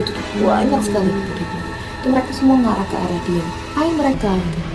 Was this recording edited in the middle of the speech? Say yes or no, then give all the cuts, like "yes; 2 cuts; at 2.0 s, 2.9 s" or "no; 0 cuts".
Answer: no; 0 cuts